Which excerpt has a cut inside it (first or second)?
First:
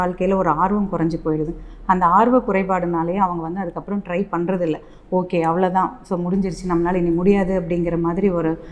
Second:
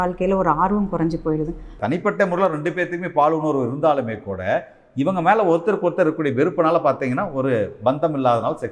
second